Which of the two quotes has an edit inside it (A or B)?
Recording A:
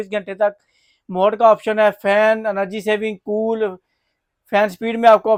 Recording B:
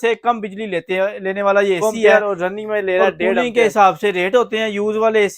B